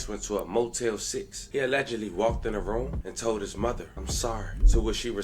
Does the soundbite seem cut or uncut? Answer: cut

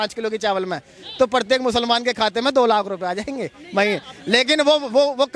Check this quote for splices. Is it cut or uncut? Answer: uncut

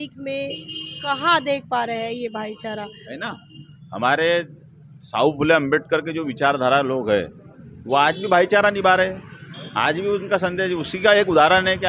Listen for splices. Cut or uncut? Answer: uncut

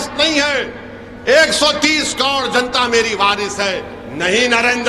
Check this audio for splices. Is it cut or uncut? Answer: uncut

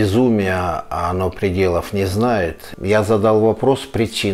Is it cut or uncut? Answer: cut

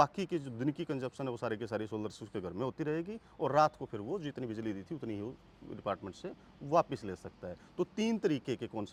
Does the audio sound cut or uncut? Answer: uncut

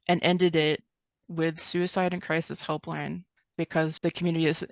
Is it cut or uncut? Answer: cut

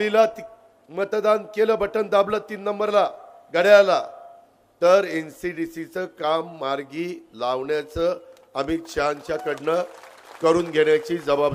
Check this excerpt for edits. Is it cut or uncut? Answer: uncut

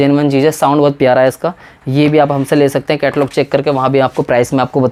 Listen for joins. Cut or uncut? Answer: uncut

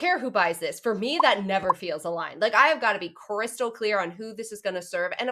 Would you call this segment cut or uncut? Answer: uncut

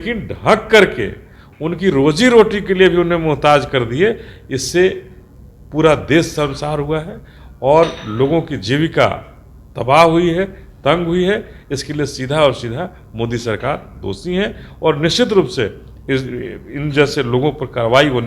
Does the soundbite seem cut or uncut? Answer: uncut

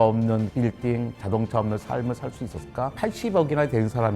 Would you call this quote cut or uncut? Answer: cut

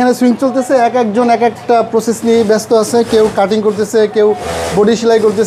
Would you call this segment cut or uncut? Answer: uncut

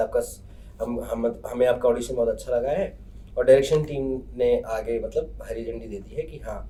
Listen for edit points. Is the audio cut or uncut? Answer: uncut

